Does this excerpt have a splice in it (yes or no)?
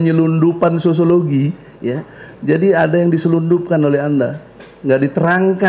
no